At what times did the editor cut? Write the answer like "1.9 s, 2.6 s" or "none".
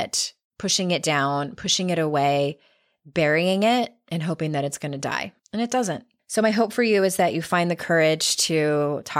5.4 s, 6.1 s